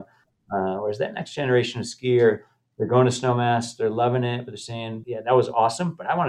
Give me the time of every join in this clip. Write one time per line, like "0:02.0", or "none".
0:05.0